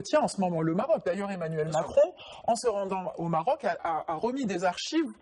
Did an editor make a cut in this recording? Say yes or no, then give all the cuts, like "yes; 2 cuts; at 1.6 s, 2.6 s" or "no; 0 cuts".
no; 0 cuts